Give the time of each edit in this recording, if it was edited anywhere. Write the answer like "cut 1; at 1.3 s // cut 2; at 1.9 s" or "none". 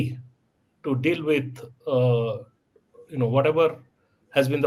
none